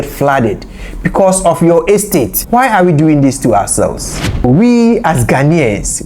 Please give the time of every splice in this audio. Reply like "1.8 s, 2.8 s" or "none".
2.4 s, 4.4 s

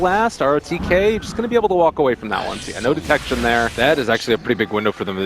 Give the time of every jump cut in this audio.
2.9 s

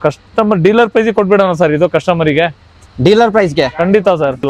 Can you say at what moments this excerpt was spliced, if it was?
none

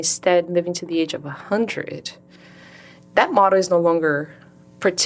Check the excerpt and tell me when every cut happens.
none

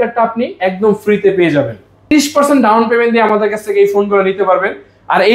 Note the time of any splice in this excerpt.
2.1 s

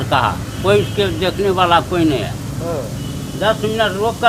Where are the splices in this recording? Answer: none

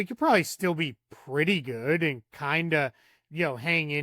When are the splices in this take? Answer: none

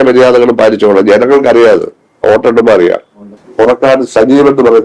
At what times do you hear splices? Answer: 3.4 s

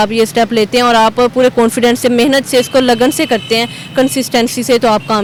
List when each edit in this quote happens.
none

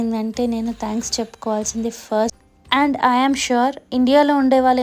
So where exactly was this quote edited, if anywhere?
2.4 s

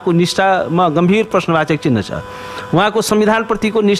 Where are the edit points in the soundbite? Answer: none

